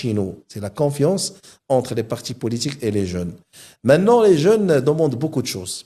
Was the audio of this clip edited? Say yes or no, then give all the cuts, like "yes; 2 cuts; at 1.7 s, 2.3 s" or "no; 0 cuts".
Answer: no; 0 cuts